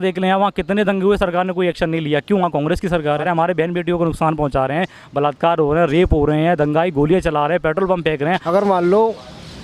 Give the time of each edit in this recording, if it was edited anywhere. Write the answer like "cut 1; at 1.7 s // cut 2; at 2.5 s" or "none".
cut 1; at 3.3 s // cut 2; at 8.4 s